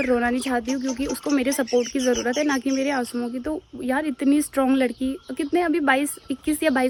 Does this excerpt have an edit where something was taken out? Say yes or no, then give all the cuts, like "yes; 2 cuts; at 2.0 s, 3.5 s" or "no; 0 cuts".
no; 0 cuts